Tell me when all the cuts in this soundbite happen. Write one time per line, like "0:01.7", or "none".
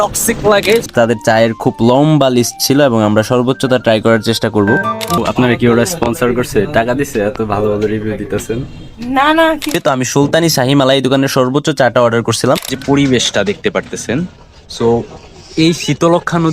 0:00.8
0:05.2
0:09.8
0:12.7